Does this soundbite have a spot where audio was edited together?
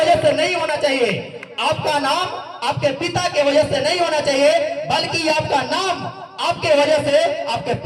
no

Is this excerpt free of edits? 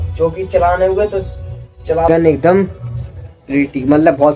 no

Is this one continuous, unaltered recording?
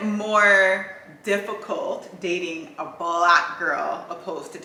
yes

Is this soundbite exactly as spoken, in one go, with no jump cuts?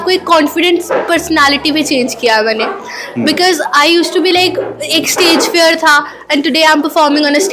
yes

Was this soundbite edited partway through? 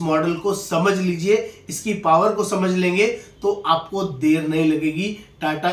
no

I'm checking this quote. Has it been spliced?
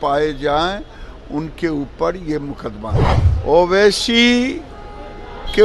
yes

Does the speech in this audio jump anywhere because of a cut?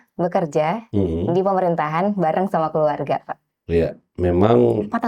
no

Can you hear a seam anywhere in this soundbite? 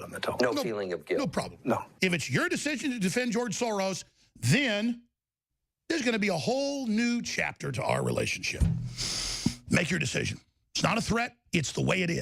yes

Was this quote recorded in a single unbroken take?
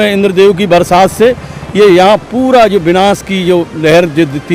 yes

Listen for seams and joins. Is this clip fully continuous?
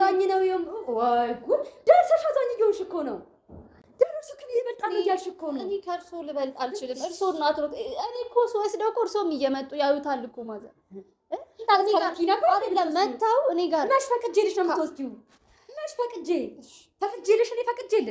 yes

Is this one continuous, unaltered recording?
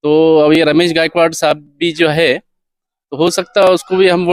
yes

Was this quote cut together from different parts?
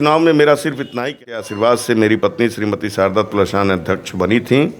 yes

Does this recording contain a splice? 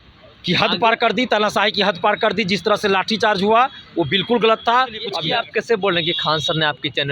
yes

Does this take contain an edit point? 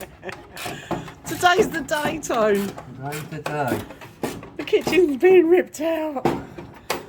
no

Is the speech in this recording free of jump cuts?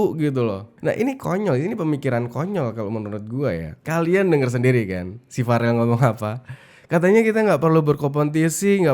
no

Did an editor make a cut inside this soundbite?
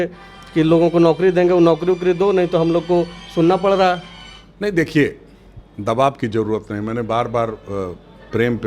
no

